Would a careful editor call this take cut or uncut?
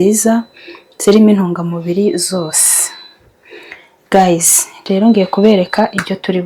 uncut